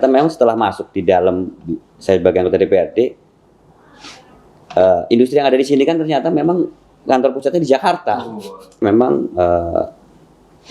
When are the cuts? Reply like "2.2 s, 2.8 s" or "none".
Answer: 8.8 s